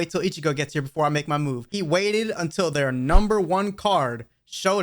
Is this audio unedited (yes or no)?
no